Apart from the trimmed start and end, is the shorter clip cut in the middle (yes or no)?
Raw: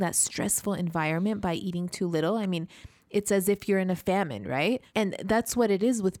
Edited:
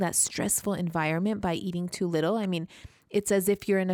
no